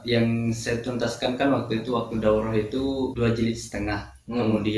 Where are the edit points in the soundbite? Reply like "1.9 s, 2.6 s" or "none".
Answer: 3.1 s